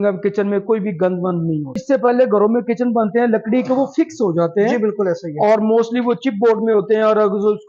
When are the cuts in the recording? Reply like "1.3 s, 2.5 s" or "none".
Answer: 1.8 s

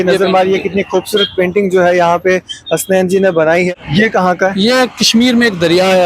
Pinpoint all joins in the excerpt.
3.7 s

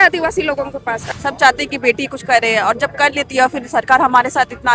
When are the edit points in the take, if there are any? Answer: 1.0 s

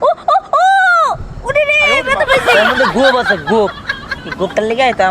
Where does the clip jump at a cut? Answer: none

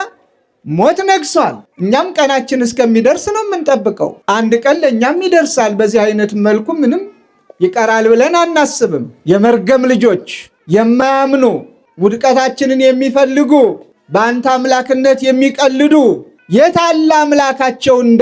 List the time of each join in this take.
1.7 s, 9.1 s

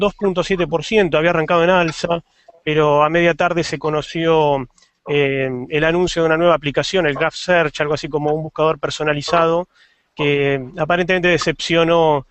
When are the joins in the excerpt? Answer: 8.5 s

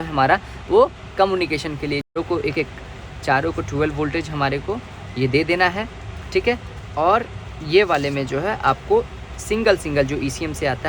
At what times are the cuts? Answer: 2.1 s

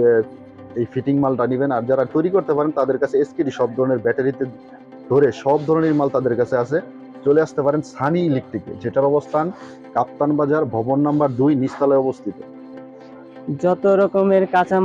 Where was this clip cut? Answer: 12.9 s

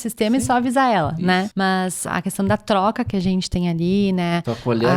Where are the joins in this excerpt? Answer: 2.0 s

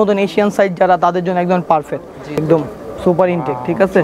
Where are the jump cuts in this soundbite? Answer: 2.4 s

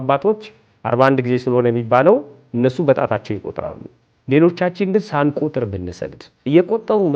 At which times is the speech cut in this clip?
none

